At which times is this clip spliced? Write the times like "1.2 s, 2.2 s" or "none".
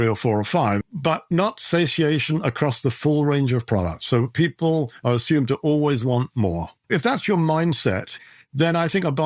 6.7 s, 8.1 s